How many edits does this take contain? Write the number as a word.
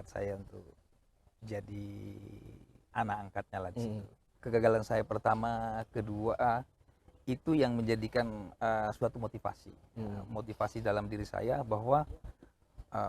one